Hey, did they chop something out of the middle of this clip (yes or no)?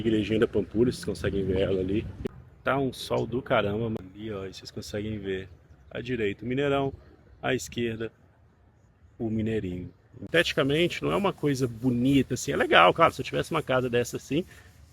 yes